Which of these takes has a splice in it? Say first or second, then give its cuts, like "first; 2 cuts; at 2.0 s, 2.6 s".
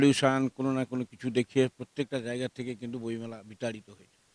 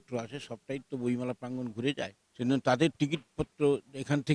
second; 1 cut; at 2.2 s